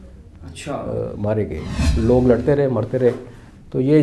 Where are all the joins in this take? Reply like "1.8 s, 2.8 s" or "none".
1.8 s